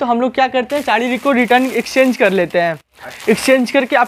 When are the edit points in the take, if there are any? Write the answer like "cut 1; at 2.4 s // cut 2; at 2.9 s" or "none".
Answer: none